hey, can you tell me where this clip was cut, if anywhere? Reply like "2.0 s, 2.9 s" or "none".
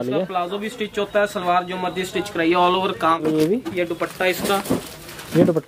3.2 s